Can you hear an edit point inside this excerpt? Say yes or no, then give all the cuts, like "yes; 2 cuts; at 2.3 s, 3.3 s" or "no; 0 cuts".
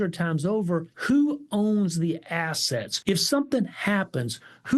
yes; 2 cuts; at 0.9 s, 2.9 s